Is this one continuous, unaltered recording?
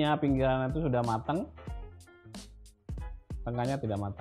no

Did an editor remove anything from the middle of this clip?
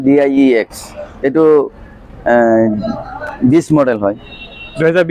no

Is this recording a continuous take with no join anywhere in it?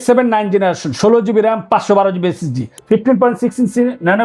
no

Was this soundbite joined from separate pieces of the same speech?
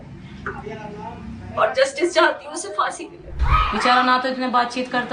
yes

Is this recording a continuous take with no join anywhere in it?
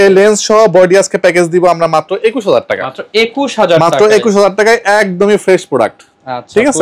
yes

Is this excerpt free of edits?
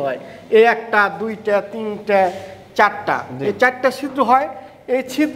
yes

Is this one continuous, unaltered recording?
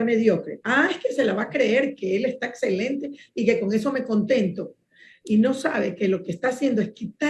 yes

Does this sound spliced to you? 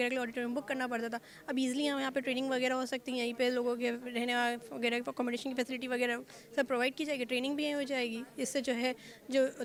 no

